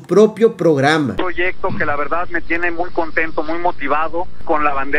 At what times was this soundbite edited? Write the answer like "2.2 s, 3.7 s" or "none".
1.2 s